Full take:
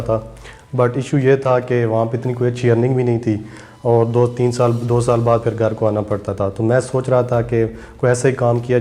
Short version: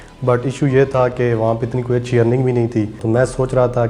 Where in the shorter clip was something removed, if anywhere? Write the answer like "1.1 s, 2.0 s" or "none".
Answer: 3.0 s